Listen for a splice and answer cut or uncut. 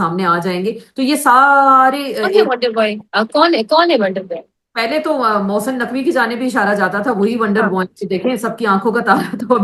uncut